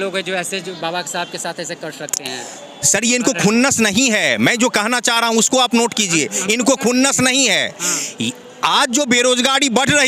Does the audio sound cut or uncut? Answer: uncut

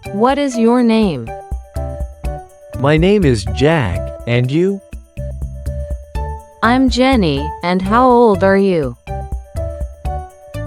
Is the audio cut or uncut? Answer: cut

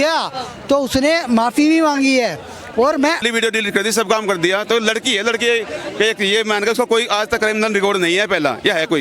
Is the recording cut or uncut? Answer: cut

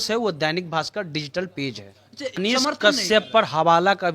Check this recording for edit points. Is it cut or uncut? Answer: cut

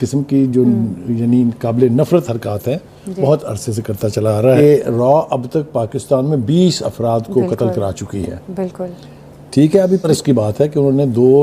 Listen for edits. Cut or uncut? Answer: cut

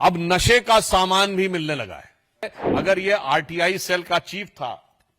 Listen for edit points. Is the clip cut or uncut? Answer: cut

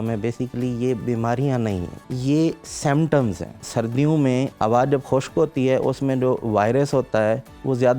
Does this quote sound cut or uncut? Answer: cut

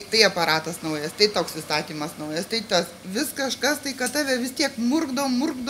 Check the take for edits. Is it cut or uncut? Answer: uncut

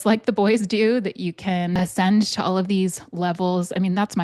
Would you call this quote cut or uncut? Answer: cut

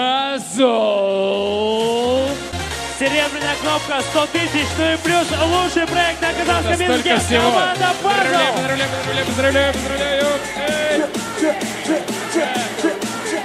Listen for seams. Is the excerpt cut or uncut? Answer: cut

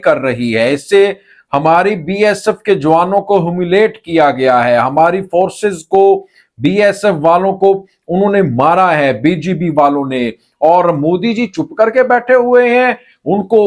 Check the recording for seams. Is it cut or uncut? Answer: uncut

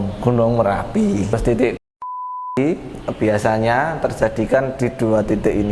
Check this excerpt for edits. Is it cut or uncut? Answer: cut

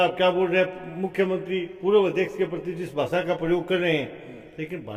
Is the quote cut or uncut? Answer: uncut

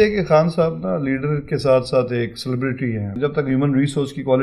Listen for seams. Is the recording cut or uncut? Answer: cut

